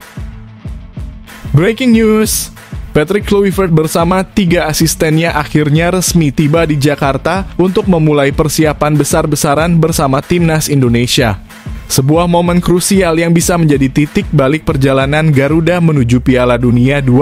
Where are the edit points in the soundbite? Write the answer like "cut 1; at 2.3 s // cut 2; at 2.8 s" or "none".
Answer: cut 1; at 1.5 s